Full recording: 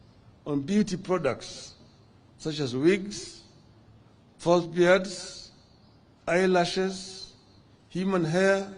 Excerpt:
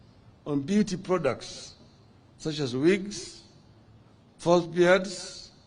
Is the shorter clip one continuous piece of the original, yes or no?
yes